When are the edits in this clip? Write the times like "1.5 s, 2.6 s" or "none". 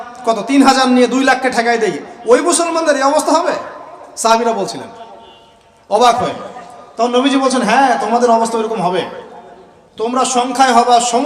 none